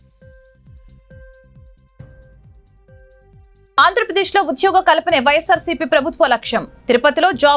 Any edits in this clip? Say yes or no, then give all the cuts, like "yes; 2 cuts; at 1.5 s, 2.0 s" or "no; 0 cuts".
yes; 1 cut; at 1.0 s